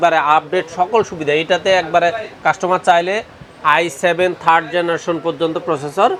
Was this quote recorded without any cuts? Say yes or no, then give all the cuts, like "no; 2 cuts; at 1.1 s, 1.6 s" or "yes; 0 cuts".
yes; 0 cuts